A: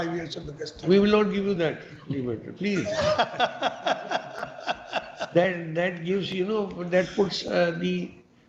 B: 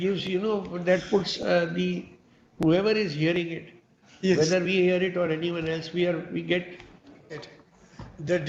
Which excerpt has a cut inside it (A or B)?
B